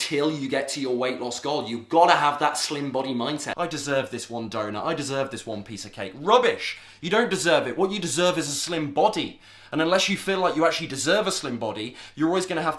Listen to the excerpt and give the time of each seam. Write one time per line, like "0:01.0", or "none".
0:03.5